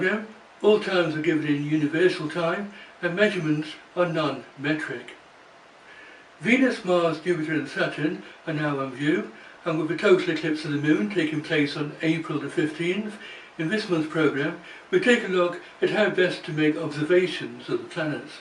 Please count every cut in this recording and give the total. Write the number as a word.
one